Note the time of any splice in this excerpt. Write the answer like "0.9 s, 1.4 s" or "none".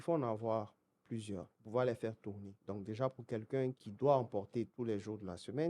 1.5 s, 2.5 s, 3.8 s, 4.7 s